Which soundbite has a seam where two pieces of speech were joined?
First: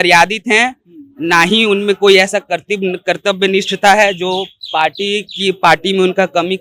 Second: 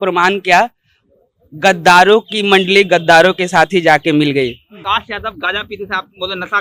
second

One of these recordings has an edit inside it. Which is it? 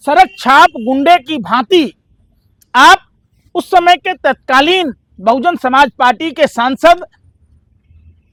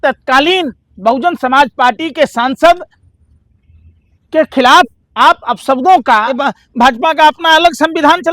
second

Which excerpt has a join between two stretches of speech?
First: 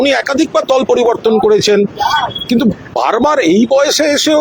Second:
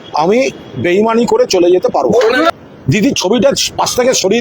second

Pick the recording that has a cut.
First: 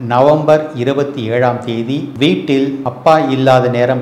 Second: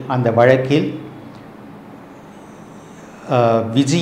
first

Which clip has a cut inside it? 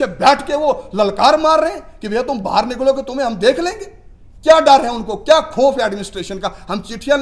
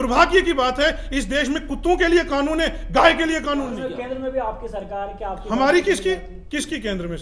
second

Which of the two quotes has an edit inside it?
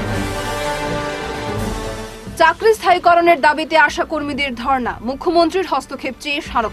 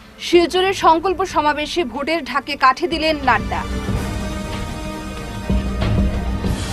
first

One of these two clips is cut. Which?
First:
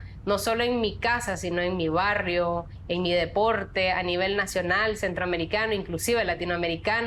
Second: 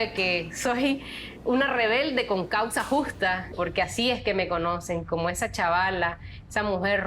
second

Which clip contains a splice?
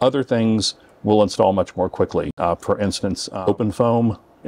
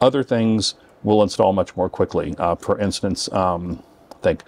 first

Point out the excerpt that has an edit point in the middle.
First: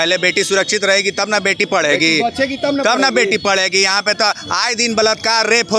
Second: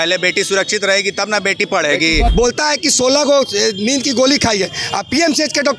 second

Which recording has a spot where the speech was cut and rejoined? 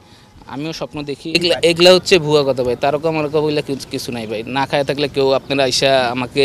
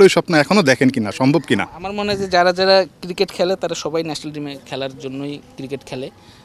first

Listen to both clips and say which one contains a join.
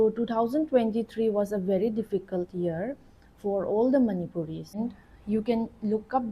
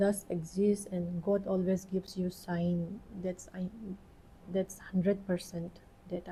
first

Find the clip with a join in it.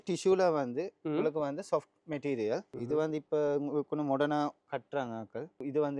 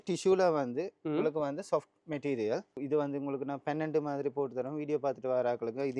second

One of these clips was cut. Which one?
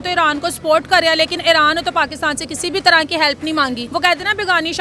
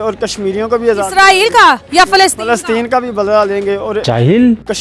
first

